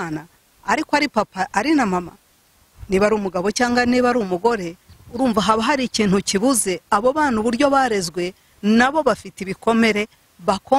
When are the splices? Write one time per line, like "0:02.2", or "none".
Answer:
none